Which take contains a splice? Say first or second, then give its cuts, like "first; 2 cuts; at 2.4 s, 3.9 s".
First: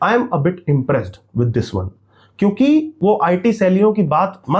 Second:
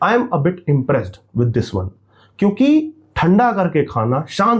first; 1 cut; at 2.9 s